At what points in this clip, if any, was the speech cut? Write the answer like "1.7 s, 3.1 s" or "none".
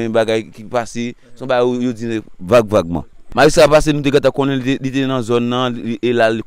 3.2 s